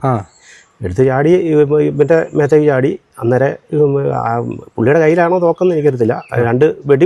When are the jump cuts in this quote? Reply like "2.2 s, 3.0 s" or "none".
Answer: none